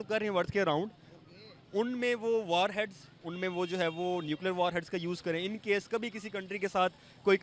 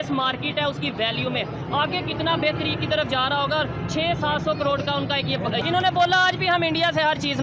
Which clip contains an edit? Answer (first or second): second